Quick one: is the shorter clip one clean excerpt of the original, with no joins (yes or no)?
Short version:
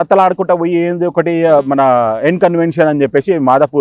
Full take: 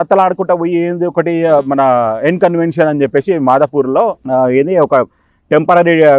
yes